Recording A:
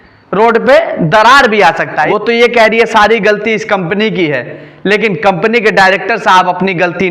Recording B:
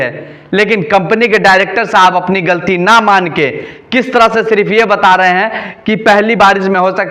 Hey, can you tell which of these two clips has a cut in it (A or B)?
A